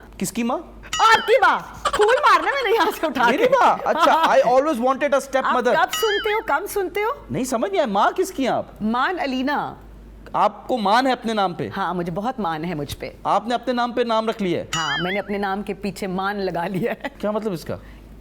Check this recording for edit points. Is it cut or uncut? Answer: uncut